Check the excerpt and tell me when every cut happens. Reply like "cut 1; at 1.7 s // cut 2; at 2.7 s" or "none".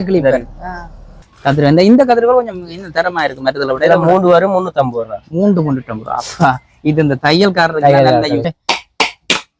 cut 1; at 1.2 s // cut 2; at 8.5 s